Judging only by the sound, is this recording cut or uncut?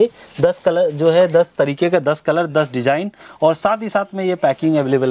uncut